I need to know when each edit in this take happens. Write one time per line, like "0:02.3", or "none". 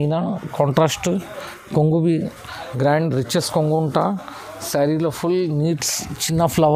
none